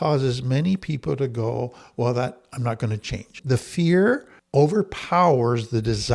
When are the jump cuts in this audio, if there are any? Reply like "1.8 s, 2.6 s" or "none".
none